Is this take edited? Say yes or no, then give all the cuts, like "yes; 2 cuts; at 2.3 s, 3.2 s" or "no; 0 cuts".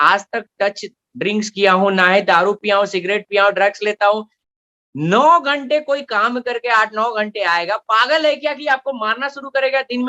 no; 0 cuts